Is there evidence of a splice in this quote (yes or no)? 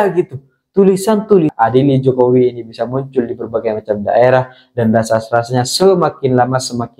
yes